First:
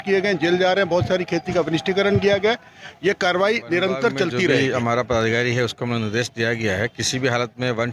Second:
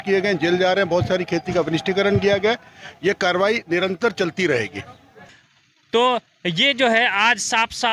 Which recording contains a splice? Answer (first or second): first